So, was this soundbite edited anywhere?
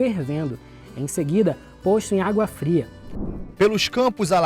yes; 1 cut; at 3.0 s

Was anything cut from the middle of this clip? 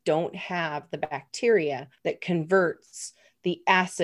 yes; 1 cut; at 1.9 s

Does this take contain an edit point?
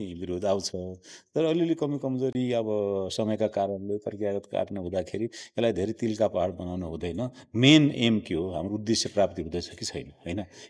no; 0 cuts

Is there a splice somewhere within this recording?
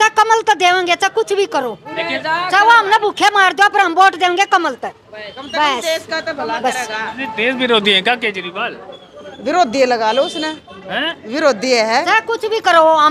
no; 0 cuts

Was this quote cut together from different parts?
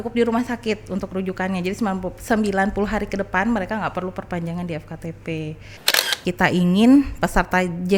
yes; 1 cut; at 6.2 s

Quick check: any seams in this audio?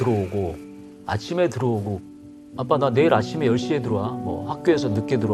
no; 0 cuts

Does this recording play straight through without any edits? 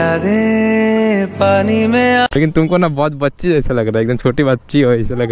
no; 1 cut; at 2.4 s

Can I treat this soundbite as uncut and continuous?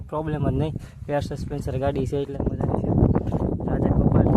no; 1 cut; at 2.3 s

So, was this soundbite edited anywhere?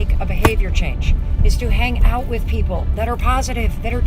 no; 0 cuts

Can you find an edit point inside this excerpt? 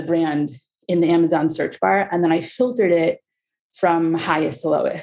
no; 0 cuts

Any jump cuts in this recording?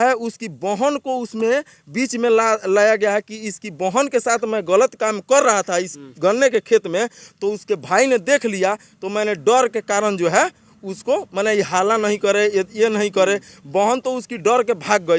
no; 0 cuts

